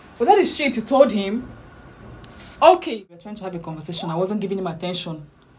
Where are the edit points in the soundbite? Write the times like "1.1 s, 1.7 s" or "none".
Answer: 3.1 s